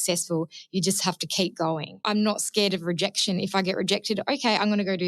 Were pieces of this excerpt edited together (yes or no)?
yes